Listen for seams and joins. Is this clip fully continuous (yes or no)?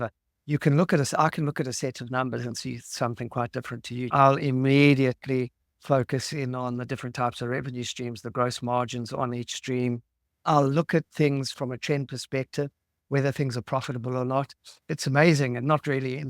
no